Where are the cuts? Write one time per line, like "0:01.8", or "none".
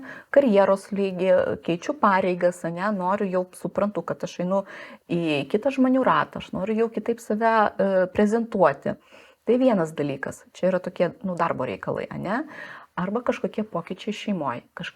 none